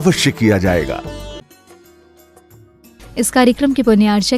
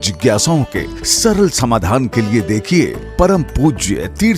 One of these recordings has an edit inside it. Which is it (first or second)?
first